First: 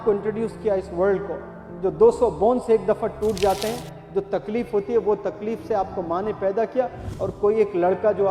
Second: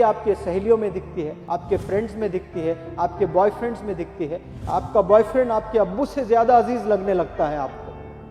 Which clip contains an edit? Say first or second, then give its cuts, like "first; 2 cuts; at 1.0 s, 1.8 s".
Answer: second; 1 cut; at 1.4 s